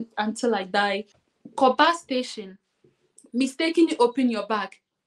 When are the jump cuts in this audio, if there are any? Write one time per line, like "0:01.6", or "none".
0:01.2